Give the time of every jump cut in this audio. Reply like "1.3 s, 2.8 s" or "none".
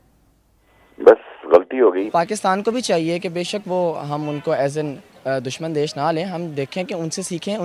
2.0 s